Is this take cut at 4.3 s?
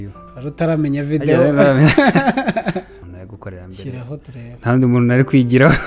no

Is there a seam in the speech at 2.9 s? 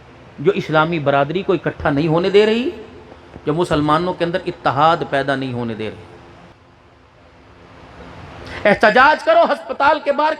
no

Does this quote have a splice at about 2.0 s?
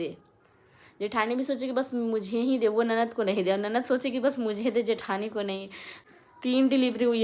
no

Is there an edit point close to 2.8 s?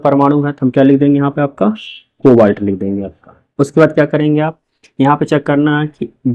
no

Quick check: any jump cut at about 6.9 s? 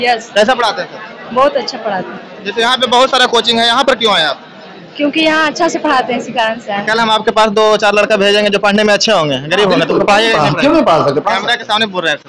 yes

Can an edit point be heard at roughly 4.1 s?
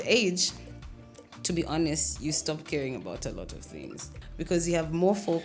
yes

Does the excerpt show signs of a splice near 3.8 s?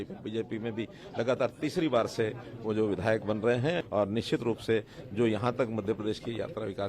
yes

